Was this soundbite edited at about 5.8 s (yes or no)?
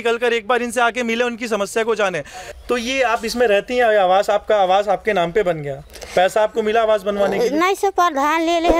no